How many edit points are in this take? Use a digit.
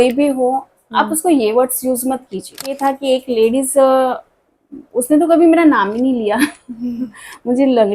1